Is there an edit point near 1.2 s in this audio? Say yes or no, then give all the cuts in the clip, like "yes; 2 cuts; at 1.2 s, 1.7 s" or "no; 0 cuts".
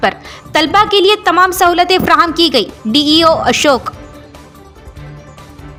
no; 0 cuts